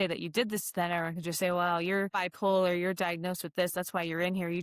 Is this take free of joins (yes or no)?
no